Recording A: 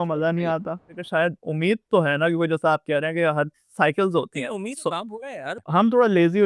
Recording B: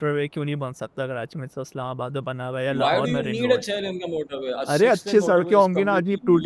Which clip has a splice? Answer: A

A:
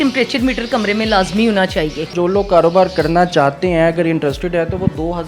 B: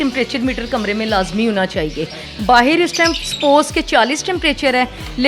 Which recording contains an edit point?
A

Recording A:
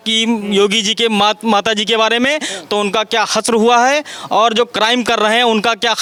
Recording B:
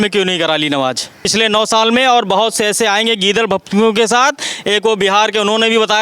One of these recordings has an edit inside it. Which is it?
B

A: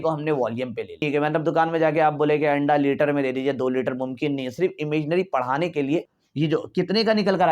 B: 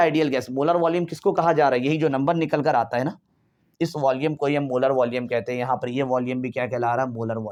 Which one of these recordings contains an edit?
A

